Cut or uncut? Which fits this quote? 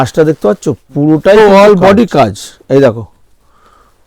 cut